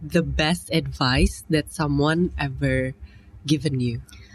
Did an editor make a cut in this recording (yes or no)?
no